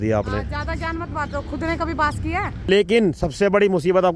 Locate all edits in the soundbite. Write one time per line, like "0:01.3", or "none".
0:02.7